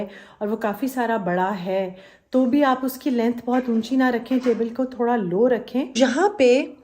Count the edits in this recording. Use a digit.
1